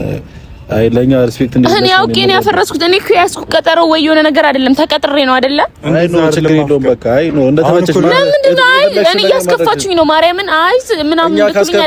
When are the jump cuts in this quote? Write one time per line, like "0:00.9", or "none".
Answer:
none

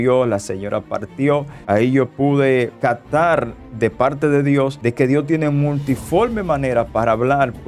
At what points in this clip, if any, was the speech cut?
0:01.6

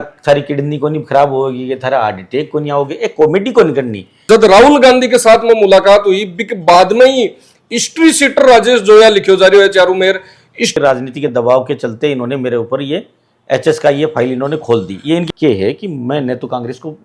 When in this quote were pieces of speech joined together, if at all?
0:04.1
0:10.8
0:15.2

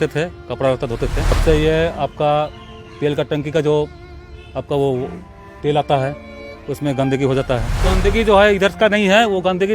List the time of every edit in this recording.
0:01.4
0:07.9

